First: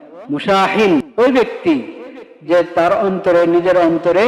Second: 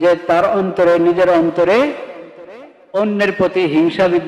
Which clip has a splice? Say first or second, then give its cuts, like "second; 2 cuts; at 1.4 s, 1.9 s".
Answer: first; 1 cut; at 1.1 s